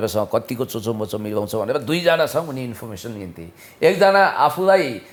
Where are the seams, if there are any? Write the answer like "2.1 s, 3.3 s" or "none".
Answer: none